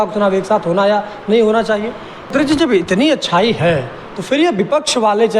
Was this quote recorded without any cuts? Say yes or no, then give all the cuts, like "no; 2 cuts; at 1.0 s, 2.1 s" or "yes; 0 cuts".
no; 1 cut; at 2.3 s